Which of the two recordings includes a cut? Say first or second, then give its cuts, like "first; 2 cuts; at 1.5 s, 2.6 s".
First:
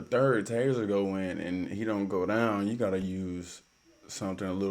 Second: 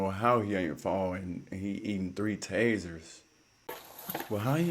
second; 1 cut; at 3.8 s